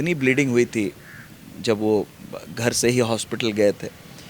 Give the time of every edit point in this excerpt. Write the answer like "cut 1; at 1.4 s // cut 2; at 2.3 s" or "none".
none